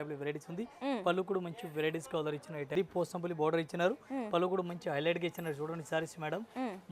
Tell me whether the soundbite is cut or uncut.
cut